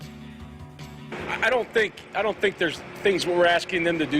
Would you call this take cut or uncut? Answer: cut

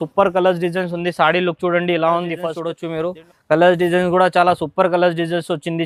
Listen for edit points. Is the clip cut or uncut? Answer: uncut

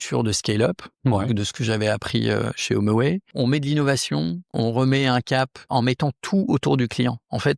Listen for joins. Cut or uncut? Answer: cut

